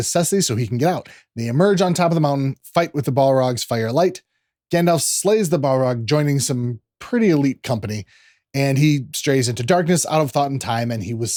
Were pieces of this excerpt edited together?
no; 0 cuts

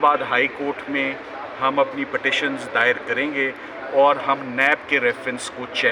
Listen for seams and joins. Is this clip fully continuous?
yes; 0 cuts

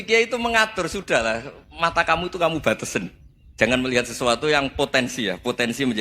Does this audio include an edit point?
no; 0 cuts

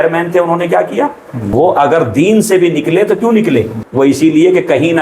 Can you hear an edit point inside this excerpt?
yes; 2 cuts; at 1.5 s, 3.8 s

